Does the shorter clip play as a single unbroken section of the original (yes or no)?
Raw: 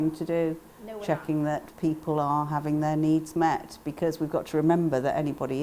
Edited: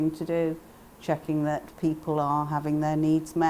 yes